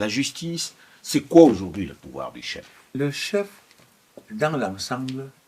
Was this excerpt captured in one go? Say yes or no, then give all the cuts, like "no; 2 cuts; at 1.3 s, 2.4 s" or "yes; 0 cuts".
no; 1 cut; at 2.9 s